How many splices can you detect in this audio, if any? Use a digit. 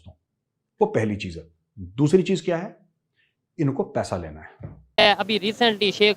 1